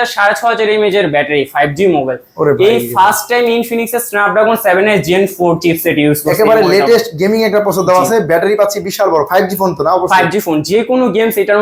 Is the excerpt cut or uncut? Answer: uncut